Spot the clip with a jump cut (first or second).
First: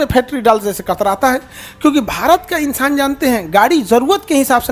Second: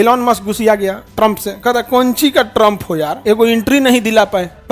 second